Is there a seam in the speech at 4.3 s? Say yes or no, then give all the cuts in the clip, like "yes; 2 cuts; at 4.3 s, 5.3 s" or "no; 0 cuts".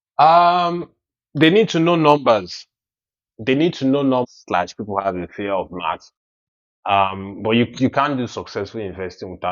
yes; 1 cut; at 4.3 s